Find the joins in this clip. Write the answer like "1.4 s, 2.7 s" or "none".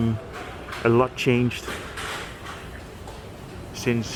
none